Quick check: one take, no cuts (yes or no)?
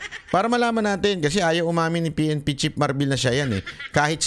yes